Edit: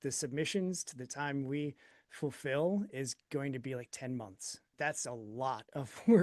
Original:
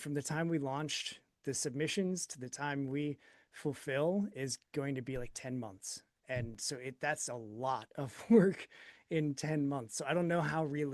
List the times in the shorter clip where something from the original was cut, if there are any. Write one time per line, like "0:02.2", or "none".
0:04.7